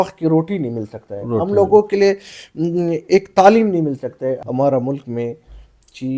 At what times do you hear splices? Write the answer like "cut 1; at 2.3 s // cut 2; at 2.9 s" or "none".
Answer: cut 1; at 4.4 s